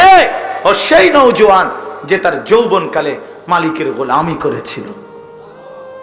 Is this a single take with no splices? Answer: no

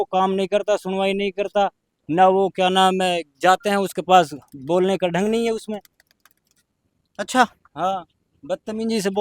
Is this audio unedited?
yes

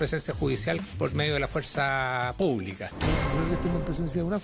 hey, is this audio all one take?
no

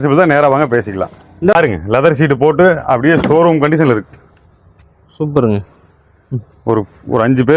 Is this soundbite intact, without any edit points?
no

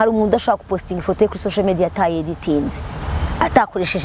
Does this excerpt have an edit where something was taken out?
no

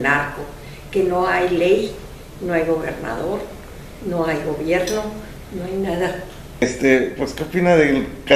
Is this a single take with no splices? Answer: no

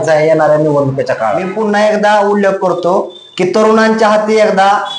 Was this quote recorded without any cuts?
no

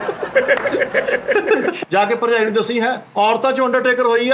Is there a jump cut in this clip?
yes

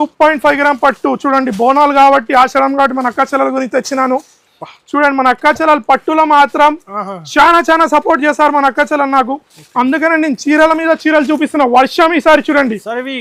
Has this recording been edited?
no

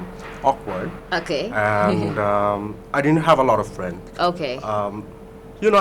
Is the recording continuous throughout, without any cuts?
yes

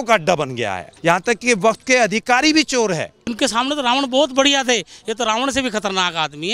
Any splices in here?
yes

